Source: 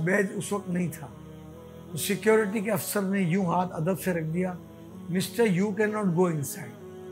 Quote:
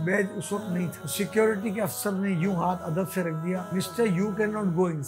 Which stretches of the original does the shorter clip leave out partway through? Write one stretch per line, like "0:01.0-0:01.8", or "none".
0:01.0-0:01.9
0:04.6-0:05.1